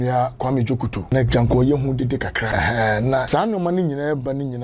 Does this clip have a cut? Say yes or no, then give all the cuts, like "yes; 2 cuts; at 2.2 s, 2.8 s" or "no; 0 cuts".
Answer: yes; 3 cuts; at 1.0 s, 2.5 s, 3.3 s